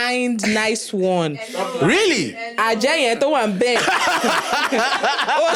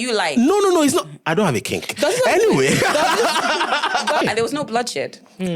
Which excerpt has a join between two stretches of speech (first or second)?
second